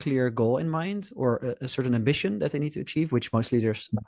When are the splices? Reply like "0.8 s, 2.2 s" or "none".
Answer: none

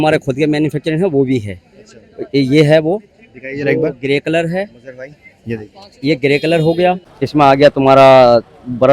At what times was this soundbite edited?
7.1 s

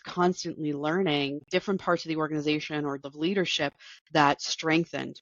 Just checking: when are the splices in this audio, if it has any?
1.5 s, 3.0 s

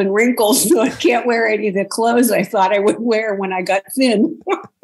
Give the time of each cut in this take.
none

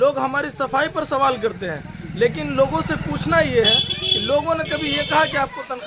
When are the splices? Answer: none

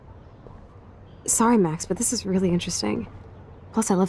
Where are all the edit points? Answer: 0.9 s

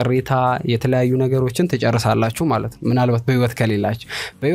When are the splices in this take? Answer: none

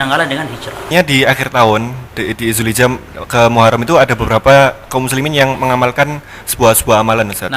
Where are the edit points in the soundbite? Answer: 0.9 s

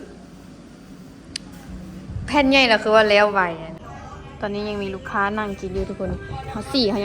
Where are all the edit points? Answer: 4.3 s

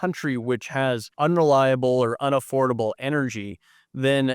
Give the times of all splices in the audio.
1.1 s

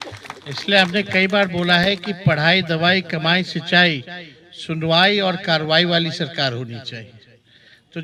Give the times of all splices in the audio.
none

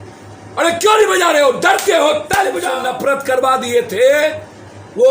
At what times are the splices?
2.7 s

